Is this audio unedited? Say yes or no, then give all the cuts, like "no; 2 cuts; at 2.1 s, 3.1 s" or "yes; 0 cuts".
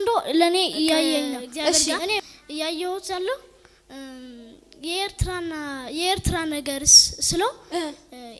no; 1 cut; at 2.2 s